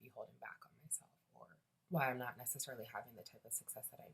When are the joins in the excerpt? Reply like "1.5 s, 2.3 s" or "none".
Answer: 1.7 s